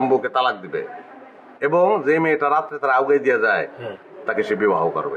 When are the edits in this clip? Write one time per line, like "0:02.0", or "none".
none